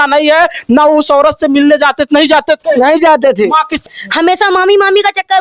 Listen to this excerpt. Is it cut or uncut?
cut